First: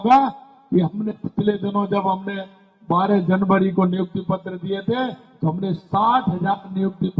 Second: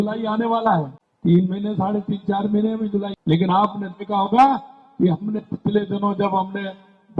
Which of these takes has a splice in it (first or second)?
second